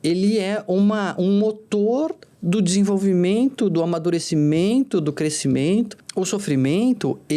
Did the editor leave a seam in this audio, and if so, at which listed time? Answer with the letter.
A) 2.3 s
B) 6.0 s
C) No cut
B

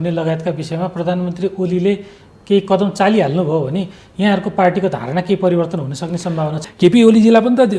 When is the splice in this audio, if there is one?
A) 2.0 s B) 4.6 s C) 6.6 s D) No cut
C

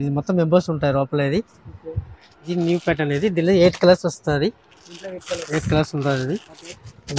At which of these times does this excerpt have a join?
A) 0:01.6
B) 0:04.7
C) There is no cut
C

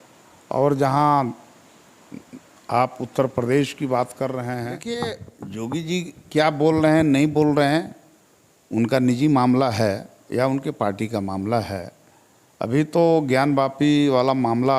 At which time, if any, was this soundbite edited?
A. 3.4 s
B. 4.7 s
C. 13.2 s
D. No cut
B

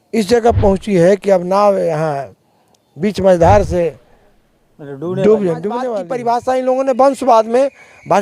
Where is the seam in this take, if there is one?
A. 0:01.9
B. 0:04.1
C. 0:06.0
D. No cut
C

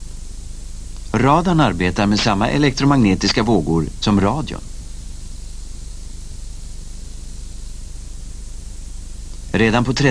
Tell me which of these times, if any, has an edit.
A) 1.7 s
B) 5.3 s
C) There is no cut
B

